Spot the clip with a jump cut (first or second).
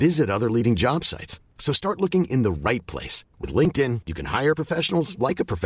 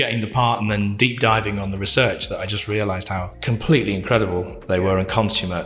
second